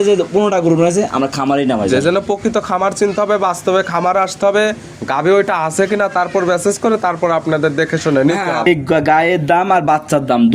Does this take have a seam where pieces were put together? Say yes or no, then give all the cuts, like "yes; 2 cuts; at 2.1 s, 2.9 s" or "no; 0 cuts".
yes; 1 cut; at 8.7 s